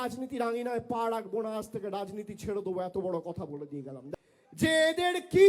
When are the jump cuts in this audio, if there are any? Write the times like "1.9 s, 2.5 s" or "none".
4.0 s